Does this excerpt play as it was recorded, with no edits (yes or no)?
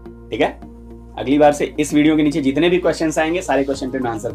yes